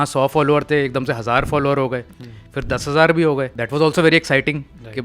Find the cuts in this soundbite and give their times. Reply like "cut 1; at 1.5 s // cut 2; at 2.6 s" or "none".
cut 1; at 3.6 s